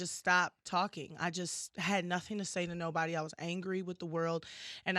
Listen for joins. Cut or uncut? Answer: uncut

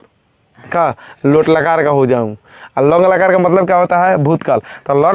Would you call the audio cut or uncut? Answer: uncut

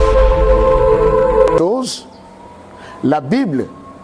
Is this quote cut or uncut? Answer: cut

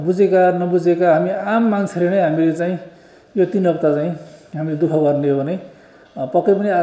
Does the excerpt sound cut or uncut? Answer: uncut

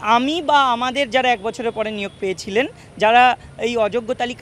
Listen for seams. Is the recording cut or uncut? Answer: uncut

